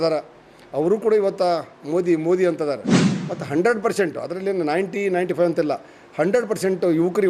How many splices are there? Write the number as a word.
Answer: zero